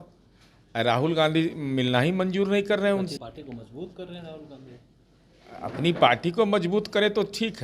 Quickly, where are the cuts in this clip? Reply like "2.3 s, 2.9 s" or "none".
3.2 s

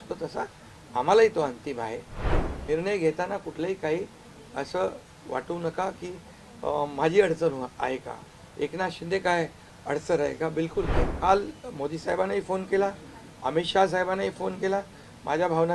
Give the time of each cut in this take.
2.3 s, 11.0 s

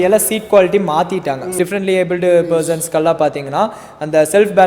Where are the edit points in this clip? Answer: 1.5 s

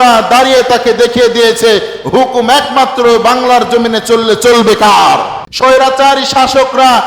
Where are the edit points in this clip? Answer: 5.4 s

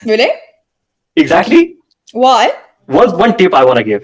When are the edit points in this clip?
2.8 s

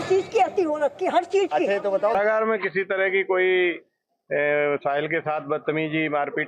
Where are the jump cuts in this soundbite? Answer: 2.1 s

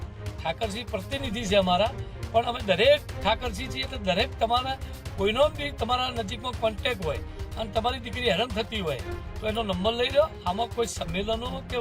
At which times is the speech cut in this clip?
none

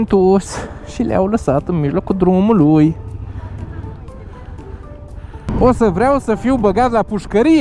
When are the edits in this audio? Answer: 5.4 s

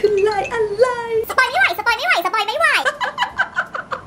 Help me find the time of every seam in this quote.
1.3 s, 2.9 s

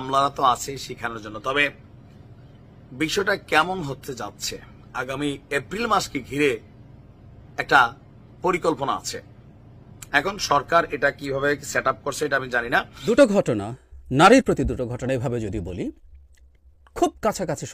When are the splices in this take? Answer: 13.1 s

